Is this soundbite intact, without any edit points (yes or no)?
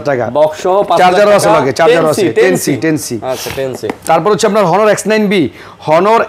yes